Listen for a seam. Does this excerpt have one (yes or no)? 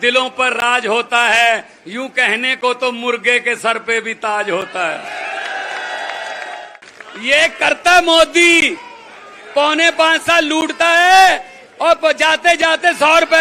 yes